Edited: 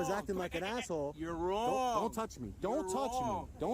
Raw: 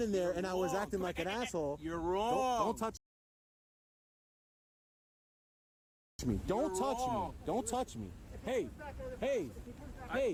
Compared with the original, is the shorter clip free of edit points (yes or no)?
no